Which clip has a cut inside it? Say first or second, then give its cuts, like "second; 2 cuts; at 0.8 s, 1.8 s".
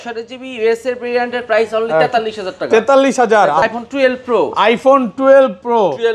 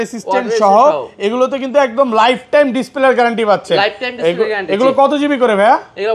first; 1 cut; at 3.6 s